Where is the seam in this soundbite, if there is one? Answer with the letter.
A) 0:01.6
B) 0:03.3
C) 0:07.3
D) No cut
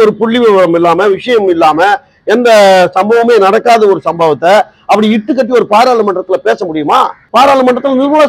D